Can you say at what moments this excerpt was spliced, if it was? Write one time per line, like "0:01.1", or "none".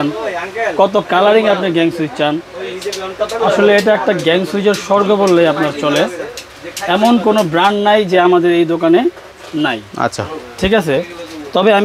none